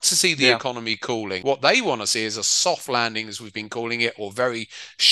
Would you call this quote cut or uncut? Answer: cut